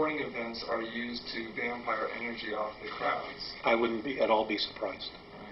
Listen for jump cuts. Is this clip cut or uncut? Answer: uncut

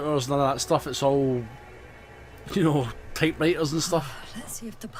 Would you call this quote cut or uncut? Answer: uncut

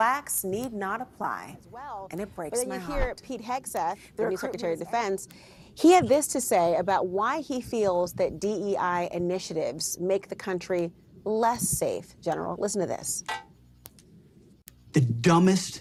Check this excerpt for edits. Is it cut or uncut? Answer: uncut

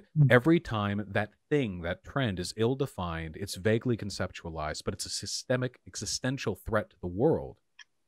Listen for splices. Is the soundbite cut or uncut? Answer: uncut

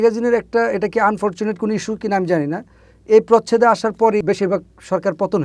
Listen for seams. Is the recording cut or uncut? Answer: cut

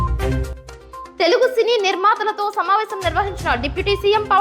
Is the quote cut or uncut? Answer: cut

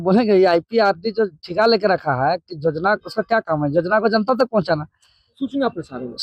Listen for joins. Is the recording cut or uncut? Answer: uncut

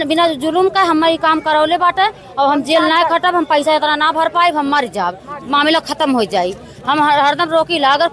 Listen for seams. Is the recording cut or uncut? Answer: uncut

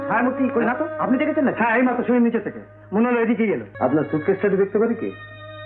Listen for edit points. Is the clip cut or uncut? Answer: cut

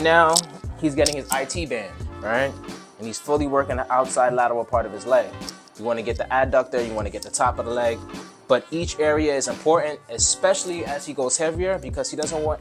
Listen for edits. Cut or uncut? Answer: uncut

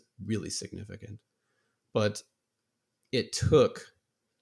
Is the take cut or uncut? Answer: uncut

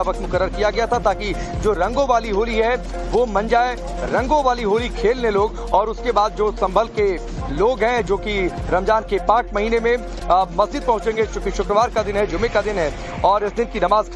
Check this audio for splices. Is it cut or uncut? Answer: cut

